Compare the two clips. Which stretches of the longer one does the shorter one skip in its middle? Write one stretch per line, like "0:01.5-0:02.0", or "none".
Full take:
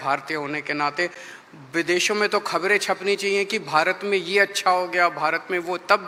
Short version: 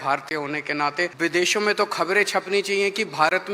0:01.1-0:01.7